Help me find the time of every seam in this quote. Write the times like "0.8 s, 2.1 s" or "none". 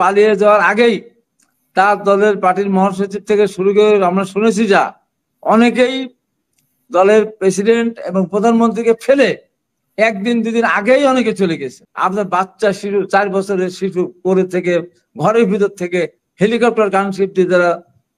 11.8 s